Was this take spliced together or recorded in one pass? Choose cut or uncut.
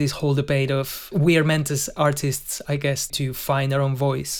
cut